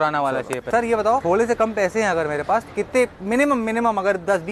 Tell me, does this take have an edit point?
yes; 1 cut; at 1.0 s

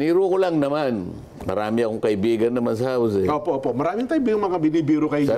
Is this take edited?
no; 0 cuts

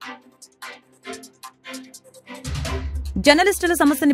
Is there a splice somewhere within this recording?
yes; 1 cut; at 3.0 s

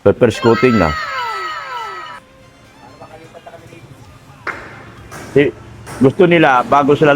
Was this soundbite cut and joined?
no; 0 cuts

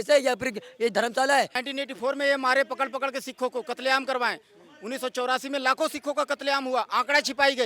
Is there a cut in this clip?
yes; 1 cut; at 1.6 s

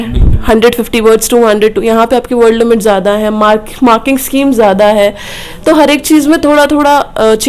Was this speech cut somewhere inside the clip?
no; 0 cuts

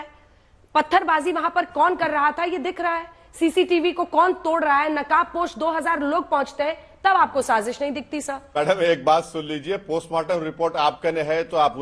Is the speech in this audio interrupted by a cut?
yes; 1 cut; at 8.5 s

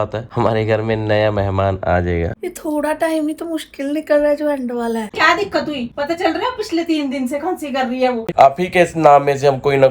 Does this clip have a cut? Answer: yes; 3 cuts; at 2.4 s, 5.1 s, 8.3 s

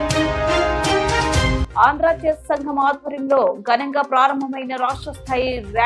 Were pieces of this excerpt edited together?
no; 0 cuts

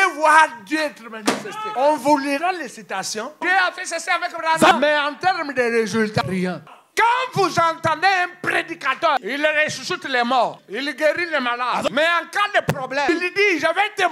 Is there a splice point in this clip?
yes; 8 cuts; at 1.6 s, 3.4 s, 4.7 s, 6.2 s, 9.2 s, 10.6 s, 11.9 s, 13.1 s

